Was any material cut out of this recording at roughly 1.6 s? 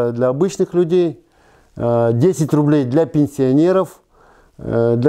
no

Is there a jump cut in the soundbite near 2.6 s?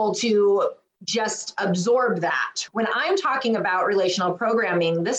yes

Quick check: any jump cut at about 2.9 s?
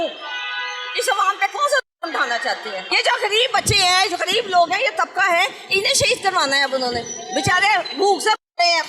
yes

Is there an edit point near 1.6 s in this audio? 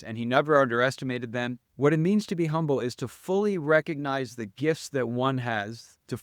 yes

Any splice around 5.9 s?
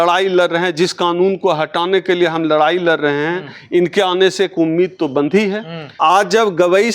yes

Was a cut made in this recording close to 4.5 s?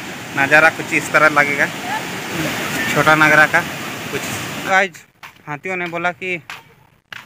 yes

